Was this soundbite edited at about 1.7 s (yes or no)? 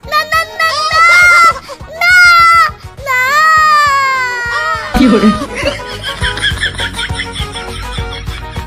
no